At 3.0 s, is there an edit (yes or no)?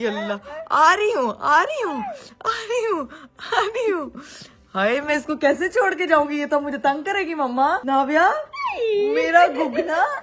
no